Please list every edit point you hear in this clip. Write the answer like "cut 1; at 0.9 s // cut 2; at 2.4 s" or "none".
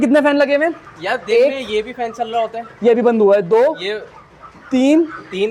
none